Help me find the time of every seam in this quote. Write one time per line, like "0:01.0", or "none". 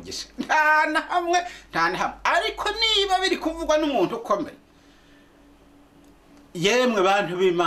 none